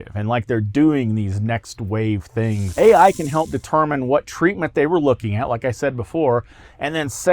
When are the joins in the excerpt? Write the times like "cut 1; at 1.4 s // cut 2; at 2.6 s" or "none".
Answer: cut 1; at 2.6 s

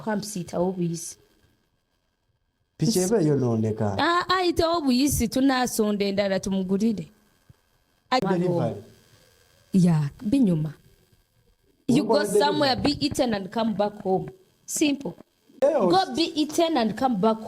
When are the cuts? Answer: cut 1; at 8.2 s // cut 2; at 15.6 s

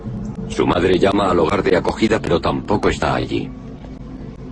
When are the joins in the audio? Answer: none

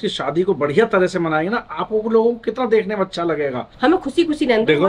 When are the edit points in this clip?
cut 1; at 3.7 s

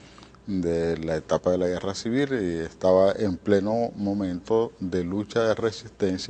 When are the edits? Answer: cut 1; at 1.2 s

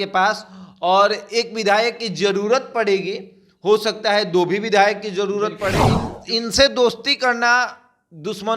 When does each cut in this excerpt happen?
cut 1; at 6.0 s

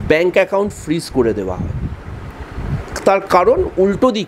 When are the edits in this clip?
none

